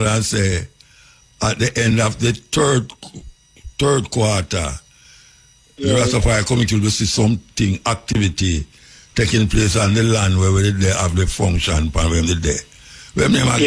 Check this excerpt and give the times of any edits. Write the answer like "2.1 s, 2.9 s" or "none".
none

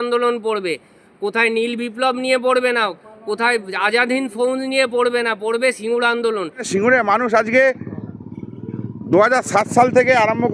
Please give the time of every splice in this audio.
6.6 s

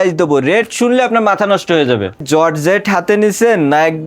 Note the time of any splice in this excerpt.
2.2 s

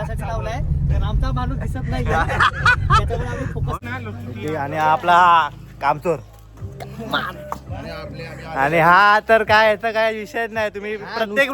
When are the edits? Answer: 3.8 s

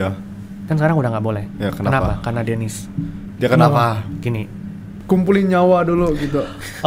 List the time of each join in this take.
4.9 s

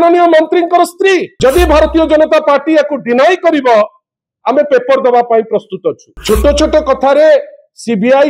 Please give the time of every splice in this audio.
1.3 s, 6.1 s

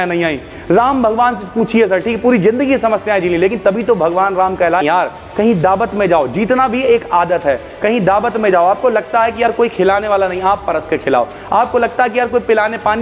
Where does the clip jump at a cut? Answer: 4.8 s

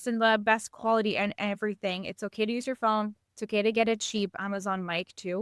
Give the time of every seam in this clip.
4.4 s

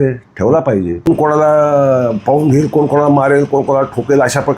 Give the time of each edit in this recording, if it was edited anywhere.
1.1 s

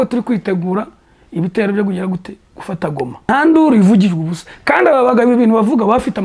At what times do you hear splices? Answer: 3.3 s

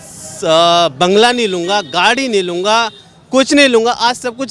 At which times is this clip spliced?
none

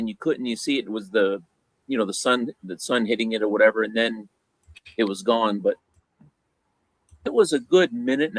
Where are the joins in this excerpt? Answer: none

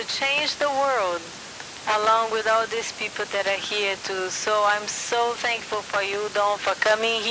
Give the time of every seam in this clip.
2.9 s

